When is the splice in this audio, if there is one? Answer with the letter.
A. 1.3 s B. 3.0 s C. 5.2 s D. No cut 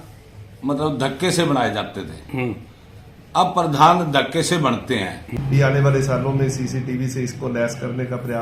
C